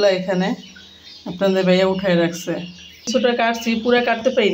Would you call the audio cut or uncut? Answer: cut